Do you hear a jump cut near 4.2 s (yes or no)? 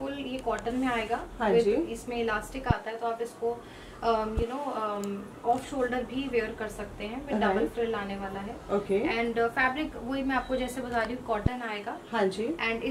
no